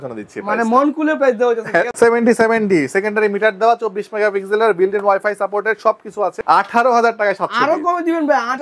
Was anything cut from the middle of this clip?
yes; 2 cuts; at 1.9 s, 6.4 s

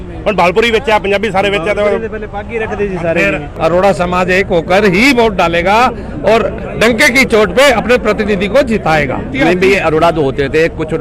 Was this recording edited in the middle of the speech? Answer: yes; 2 cuts; at 3.5 s, 9.3 s

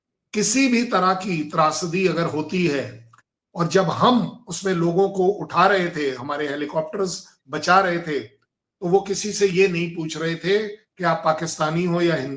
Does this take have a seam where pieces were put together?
no; 0 cuts

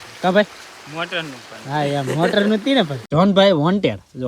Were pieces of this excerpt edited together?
yes; 1 cut; at 3.0 s

